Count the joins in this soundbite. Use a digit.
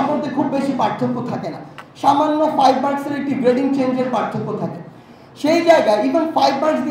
0